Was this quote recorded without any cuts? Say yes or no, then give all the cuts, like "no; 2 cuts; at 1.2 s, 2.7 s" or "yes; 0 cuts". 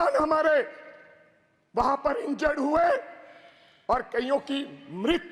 yes; 0 cuts